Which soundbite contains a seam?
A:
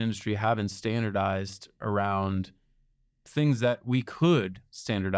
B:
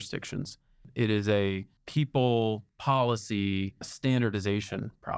B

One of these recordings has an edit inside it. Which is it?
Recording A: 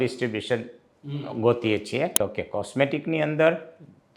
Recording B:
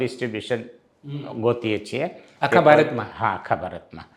A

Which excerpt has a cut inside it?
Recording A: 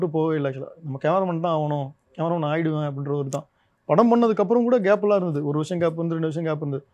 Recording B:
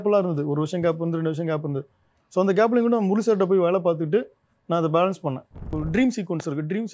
B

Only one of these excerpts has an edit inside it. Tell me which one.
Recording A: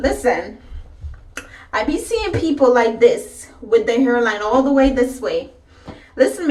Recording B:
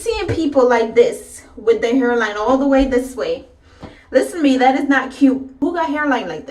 B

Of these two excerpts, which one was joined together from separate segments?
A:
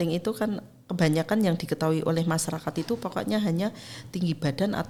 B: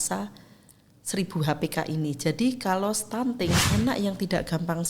B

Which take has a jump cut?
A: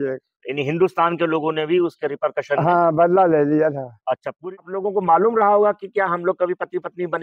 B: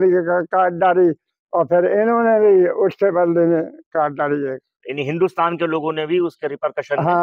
A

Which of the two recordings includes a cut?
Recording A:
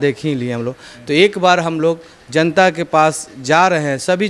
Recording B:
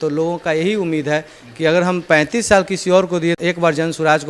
B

